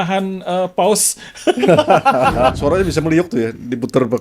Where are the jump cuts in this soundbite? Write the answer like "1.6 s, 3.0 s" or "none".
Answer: 2.6 s